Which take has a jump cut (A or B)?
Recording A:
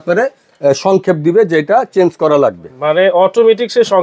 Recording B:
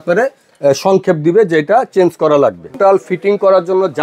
B